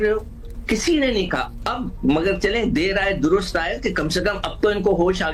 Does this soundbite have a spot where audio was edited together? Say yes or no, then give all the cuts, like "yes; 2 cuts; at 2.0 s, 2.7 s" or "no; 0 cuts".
no; 0 cuts